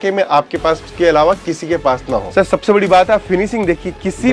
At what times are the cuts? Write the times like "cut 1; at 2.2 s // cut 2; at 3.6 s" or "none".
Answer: cut 1; at 2.2 s